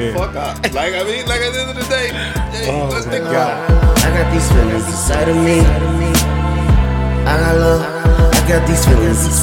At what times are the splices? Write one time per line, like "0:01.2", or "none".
0:03.6